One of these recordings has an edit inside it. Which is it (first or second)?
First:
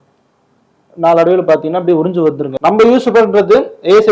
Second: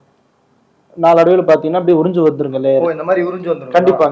first